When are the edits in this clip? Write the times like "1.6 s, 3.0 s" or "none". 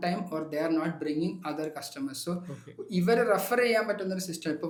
none